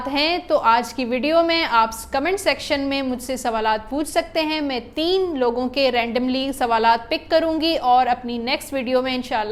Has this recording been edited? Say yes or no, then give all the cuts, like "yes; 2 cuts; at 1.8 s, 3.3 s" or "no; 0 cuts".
no; 0 cuts